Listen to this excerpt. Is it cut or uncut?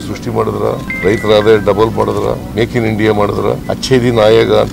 cut